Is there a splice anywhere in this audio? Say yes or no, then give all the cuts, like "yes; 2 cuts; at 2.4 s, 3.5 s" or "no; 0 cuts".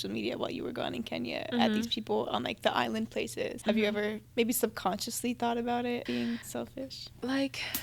yes; 3 cuts; at 3.6 s, 4.2 s, 6.2 s